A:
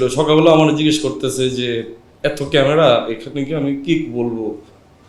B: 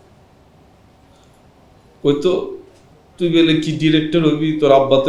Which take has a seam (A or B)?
A